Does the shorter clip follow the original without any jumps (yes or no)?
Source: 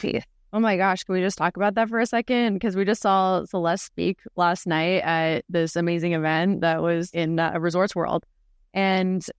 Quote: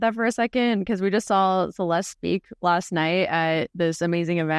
yes